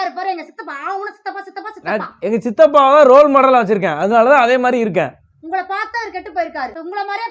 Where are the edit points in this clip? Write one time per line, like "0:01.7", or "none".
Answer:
none